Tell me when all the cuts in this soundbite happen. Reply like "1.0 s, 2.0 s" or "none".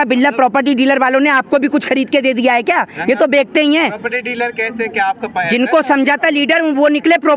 none